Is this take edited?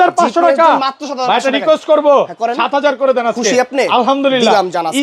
no; 0 cuts

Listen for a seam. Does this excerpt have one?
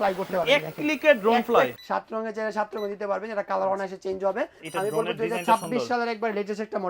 yes; 2 cuts; at 1.8 s, 4.6 s

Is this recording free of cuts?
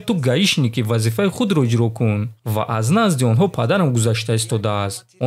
no; 1 cut; at 2.3 s

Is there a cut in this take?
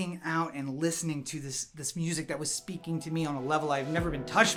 no; 0 cuts

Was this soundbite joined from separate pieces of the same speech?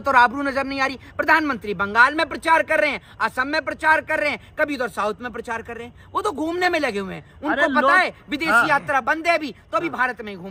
no; 0 cuts

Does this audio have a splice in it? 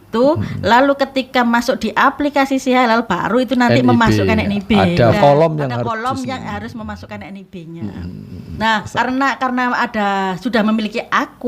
yes; 2 cuts; at 5.1 s, 8.5 s

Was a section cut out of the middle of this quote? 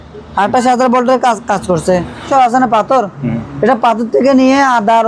yes; 1 cut; at 2.3 s

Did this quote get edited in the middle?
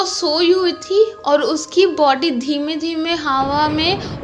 no; 0 cuts

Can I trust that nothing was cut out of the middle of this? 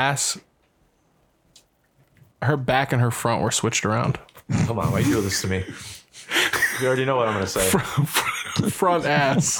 yes; 0 cuts

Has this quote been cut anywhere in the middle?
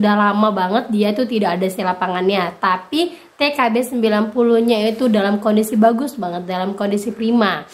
no; 0 cuts

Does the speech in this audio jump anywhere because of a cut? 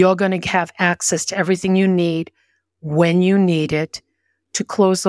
no; 0 cuts

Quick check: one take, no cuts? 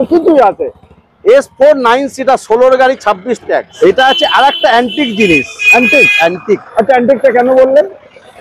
no; 1 cut; at 3.7 s

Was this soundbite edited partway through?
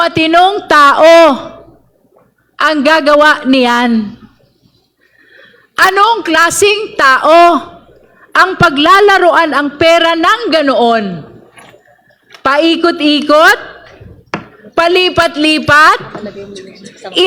no; 0 cuts

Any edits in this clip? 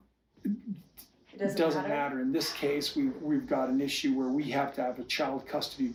no; 0 cuts

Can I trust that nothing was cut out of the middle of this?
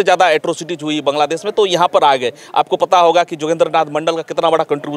yes; 0 cuts

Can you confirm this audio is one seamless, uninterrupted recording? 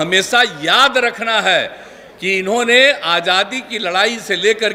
yes; 0 cuts

